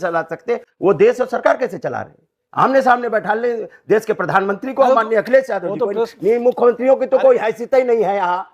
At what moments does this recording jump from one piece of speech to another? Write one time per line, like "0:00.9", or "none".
0:02.4